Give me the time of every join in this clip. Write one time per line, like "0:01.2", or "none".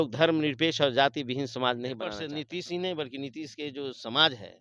0:02.2